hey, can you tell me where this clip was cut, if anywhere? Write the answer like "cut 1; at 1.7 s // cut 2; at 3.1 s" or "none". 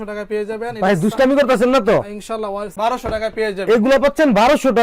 cut 1; at 2.7 s